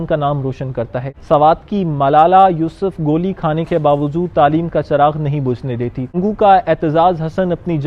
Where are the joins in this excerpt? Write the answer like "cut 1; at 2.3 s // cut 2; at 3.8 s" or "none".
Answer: cut 1; at 1.1 s // cut 2; at 6.2 s